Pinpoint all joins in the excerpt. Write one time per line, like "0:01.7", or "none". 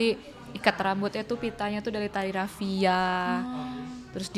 none